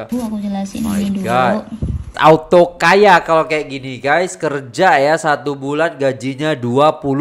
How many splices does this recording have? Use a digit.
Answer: 1